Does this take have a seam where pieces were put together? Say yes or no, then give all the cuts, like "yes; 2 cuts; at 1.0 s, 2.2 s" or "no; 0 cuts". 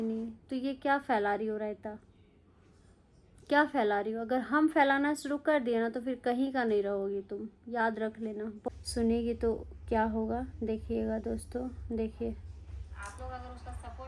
yes; 1 cut; at 8.6 s